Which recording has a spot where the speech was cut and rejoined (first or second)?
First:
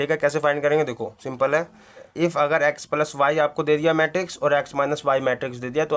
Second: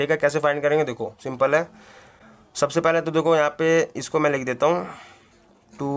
first